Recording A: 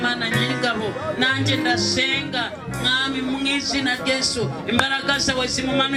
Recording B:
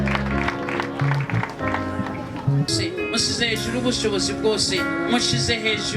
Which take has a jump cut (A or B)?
B